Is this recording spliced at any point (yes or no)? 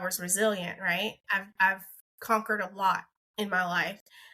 yes